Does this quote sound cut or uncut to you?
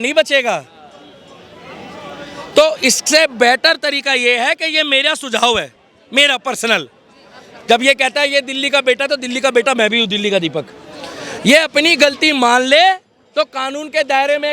uncut